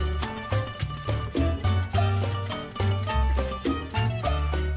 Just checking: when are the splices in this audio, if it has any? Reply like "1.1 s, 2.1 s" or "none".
1.9 s